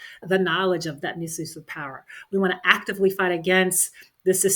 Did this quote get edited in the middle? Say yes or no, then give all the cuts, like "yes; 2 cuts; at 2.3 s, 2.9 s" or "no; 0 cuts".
yes; 1 cut; at 1.0 s